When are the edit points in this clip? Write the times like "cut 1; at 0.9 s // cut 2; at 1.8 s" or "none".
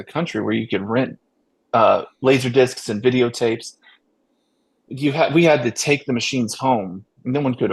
none